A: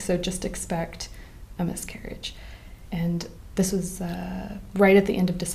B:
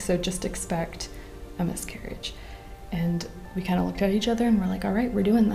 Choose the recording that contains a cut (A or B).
B